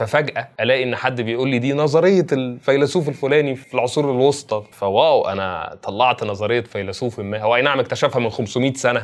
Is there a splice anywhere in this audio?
yes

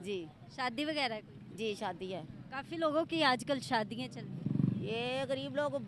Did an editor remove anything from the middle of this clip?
yes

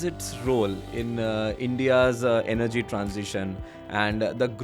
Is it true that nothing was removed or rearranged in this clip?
yes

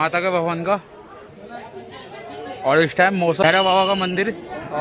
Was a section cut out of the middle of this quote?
yes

